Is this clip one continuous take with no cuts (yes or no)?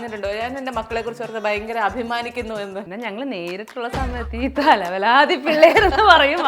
no